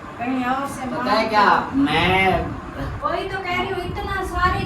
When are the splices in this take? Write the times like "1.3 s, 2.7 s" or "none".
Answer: 3.0 s